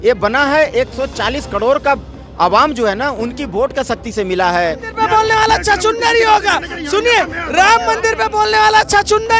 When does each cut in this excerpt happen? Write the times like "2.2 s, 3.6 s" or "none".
4.8 s

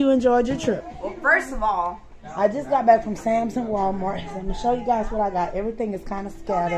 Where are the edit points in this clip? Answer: 2.2 s

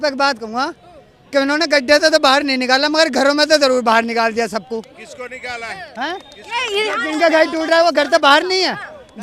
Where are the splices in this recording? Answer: none

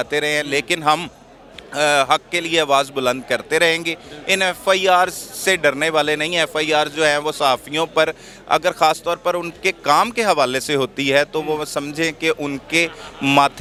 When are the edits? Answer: none

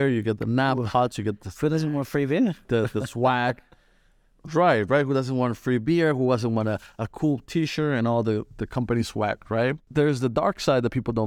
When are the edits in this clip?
9.8 s

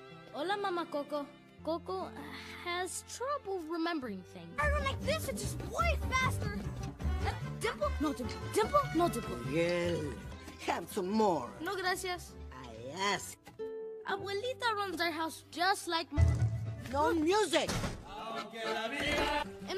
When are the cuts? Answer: 1.4 s

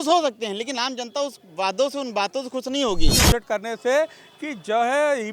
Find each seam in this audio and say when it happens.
3.2 s

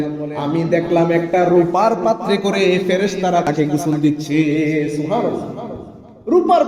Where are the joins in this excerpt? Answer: 3.5 s

